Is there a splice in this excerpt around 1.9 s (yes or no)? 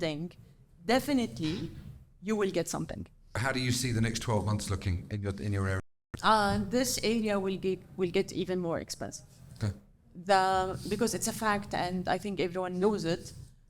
no